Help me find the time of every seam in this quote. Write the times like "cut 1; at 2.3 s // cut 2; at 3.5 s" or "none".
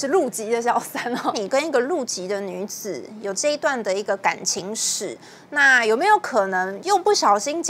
cut 1; at 1.4 s